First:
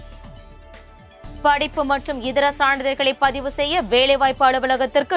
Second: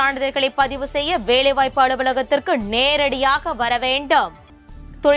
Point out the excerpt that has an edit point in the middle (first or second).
first